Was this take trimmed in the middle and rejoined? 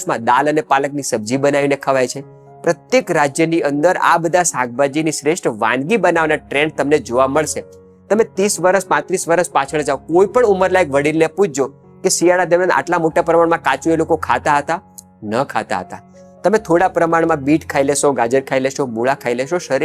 no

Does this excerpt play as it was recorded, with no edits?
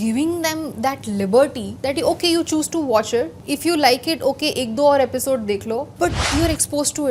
no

